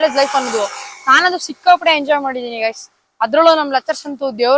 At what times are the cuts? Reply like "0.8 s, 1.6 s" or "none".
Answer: none